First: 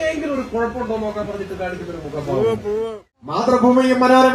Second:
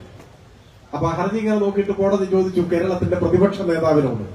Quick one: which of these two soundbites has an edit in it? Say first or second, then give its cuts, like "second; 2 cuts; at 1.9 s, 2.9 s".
first; 1 cut; at 3.0 s